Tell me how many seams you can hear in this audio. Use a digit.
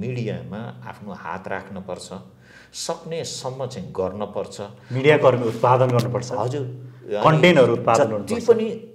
0